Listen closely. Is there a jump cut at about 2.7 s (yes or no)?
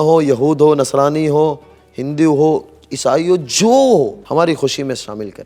no